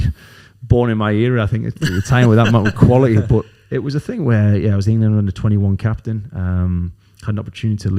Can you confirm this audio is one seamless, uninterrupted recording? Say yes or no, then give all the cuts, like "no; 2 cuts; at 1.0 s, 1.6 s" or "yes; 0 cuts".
yes; 0 cuts